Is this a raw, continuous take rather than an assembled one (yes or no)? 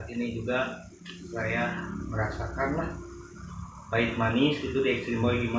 yes